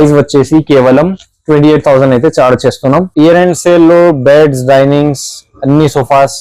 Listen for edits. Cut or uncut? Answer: cut